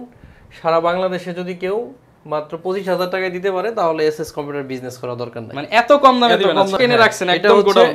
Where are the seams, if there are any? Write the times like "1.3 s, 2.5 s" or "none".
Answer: 6.8 s